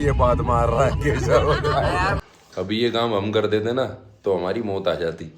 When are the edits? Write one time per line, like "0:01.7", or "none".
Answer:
0:02.2